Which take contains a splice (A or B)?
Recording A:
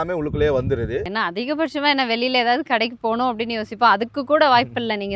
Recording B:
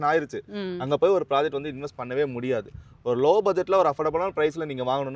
A